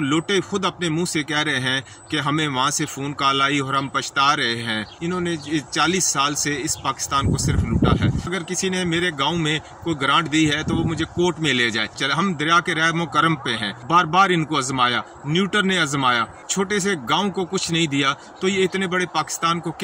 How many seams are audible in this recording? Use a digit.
5